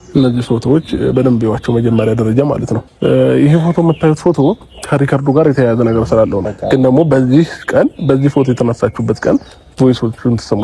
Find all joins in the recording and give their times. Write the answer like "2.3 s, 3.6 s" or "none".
2.9 s, 6.4 s